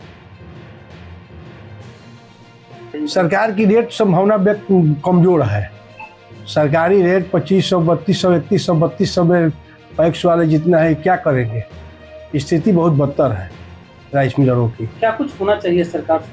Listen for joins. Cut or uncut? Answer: uncut